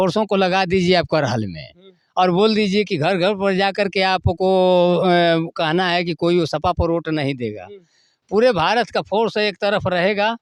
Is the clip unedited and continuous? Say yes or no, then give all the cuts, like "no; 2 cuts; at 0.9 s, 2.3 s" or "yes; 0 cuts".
yes; 0 cuts